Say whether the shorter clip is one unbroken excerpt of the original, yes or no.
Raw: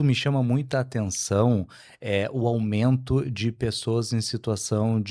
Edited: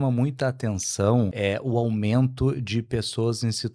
no